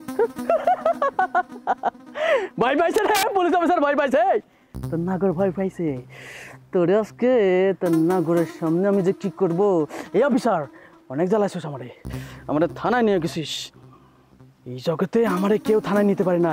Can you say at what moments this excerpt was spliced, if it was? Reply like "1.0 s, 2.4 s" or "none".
none